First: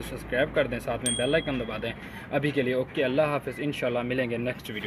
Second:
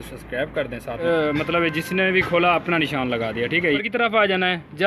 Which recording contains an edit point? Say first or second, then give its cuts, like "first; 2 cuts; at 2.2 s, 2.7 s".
second; 2 cuts; at 1.0 s, 3.8 s